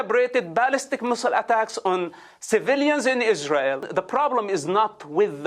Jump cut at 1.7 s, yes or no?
no